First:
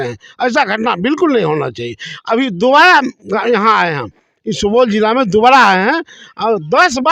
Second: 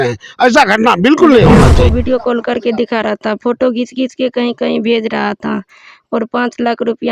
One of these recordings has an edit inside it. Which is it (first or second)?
second